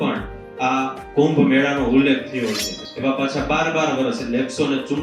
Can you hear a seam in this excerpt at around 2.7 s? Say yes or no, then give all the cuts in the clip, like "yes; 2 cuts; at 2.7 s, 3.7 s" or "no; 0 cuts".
yes; 1 cut; at 2.7 s